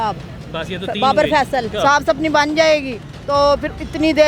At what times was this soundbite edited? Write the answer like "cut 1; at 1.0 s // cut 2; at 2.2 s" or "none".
cut 1; at 1.7 s